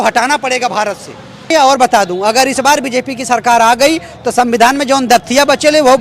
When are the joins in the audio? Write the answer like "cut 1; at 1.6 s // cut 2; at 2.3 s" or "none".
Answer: cut 1; at 1.5 s